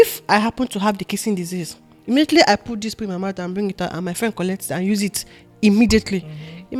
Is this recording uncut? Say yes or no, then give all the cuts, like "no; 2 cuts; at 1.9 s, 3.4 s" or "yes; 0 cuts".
yes; 0 cuts